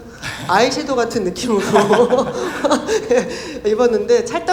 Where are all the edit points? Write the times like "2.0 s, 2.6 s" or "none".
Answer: none